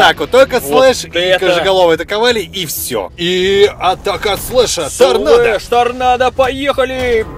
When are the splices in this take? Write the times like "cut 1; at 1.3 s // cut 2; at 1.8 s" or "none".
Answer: cut 1; at 3.1 s